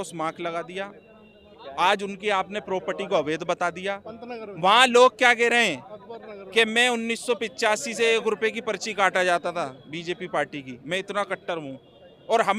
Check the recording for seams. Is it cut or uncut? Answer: uncut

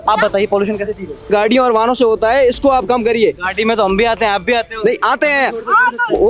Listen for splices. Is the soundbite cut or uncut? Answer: cut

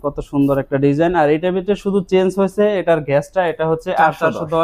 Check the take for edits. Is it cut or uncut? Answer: uncut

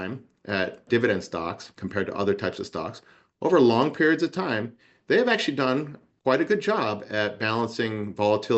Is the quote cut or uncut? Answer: uncut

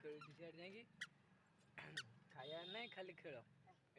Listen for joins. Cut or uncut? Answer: uncut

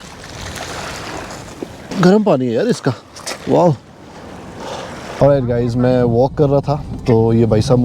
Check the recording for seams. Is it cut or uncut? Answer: cut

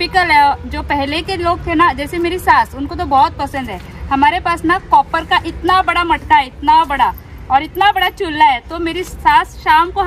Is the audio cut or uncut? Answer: uncut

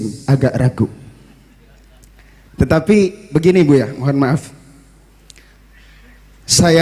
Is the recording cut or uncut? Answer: uncut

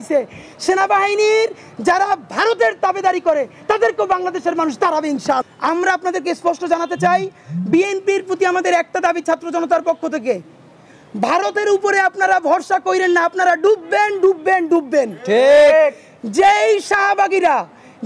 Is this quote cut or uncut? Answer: cut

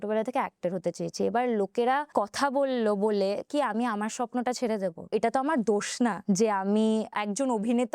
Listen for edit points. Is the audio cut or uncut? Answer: cut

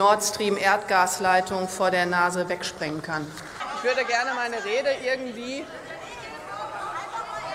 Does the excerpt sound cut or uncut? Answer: cut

